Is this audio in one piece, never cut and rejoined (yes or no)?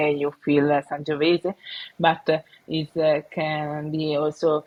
yes